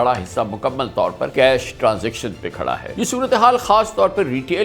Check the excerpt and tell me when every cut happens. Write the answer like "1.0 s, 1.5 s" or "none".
1.2 s, 2.9 s